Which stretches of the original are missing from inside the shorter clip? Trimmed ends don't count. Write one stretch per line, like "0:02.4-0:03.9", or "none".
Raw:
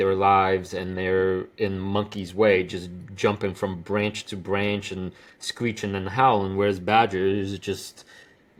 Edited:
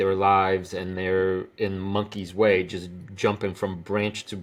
none